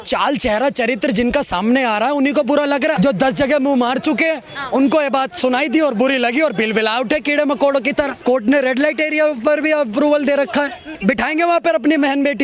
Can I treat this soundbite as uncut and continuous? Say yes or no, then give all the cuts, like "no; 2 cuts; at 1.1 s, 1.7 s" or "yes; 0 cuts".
no; 3 cuts; at 2.9 s, 8.1 s, 10.9 s